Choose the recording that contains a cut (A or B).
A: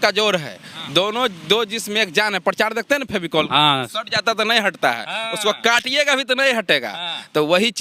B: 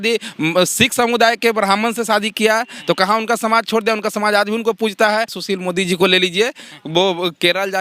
B